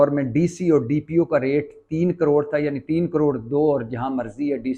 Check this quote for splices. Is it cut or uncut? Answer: uncut